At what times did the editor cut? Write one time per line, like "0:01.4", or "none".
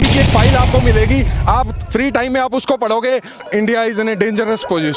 0:03.4